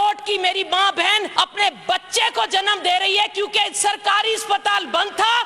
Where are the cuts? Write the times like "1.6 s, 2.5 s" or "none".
1.3 s